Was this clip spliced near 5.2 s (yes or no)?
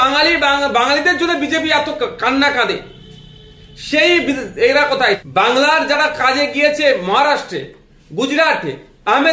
yes